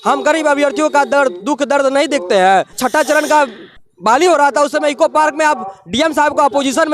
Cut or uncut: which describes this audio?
cut